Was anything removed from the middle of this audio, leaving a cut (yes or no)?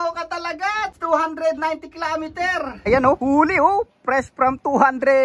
yes